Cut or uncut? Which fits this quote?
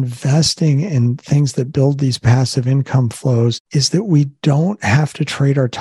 cut